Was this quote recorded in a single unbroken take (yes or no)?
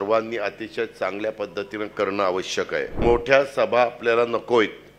no